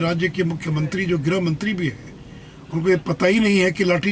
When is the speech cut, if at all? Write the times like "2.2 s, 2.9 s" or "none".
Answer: none